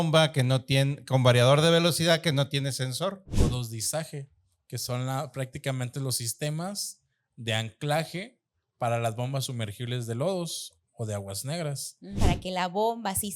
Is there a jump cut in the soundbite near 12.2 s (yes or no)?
yes